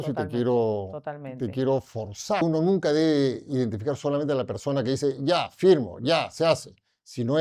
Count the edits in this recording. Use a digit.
1